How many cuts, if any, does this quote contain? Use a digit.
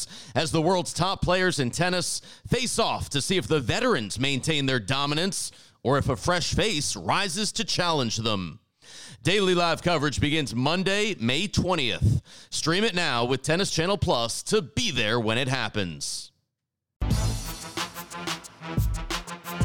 2